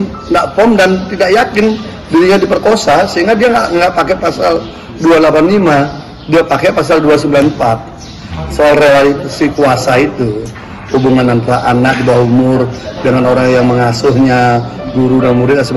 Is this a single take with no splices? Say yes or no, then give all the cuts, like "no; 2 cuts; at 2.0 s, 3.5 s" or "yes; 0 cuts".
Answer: yes; 0 cuts